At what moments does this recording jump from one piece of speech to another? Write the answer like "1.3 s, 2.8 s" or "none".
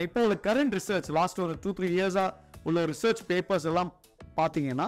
none